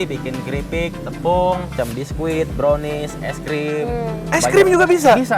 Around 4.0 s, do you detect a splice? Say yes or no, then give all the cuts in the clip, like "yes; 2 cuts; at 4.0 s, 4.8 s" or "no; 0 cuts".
no; 1 cut; at 1.7 s